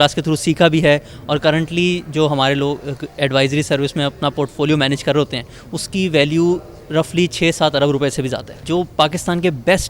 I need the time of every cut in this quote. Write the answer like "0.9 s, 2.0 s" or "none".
none